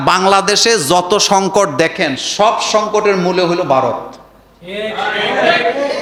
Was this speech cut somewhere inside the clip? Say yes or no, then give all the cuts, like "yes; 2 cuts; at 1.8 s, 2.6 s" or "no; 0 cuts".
no; 0 cuts